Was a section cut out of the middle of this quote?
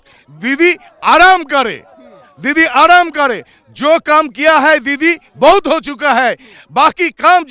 no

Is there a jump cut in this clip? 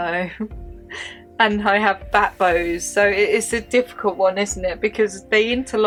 no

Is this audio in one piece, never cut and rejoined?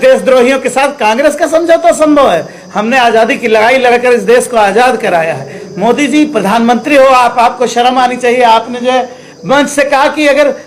yes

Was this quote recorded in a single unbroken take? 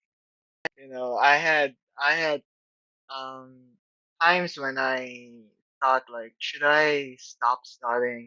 yes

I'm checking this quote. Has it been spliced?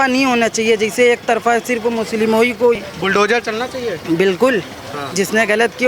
yes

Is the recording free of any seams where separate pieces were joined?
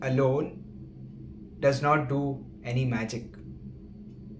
yes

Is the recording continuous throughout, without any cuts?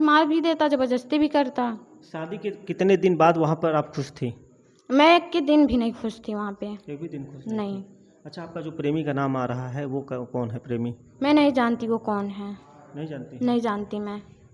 yes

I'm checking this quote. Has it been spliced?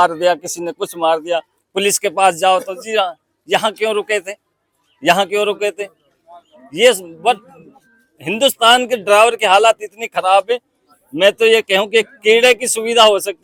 no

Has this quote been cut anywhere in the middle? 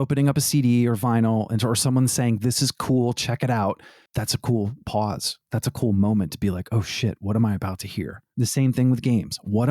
no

